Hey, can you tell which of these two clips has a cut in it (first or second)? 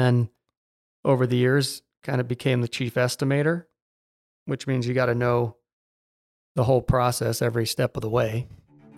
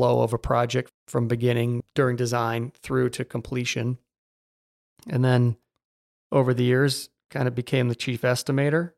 second